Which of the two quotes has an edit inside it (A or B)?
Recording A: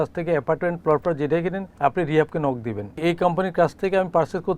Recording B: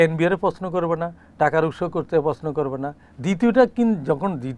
A